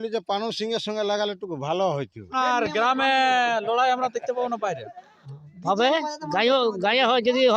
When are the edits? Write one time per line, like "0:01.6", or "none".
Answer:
0:02.3